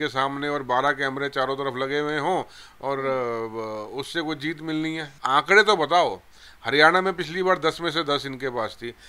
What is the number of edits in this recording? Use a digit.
1